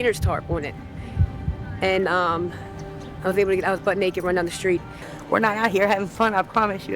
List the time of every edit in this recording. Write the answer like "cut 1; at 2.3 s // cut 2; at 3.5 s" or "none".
cut 1; at 4.9 s